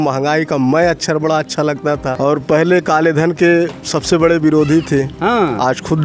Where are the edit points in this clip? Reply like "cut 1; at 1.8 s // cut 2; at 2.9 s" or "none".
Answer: cut 1; at 2.1 s